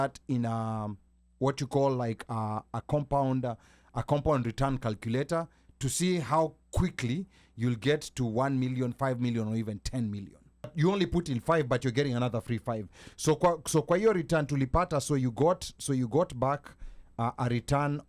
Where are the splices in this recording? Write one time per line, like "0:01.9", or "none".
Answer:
0:10.7